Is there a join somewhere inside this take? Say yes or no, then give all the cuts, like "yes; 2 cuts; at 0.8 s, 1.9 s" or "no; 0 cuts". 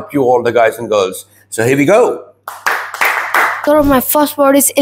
yes; 1 cut; at 3.6 s